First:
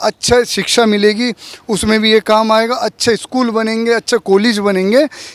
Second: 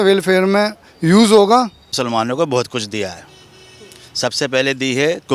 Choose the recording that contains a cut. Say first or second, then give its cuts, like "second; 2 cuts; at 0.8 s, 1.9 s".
second; 1 cut; at 2.0 s